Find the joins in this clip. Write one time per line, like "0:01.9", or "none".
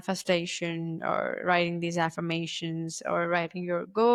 none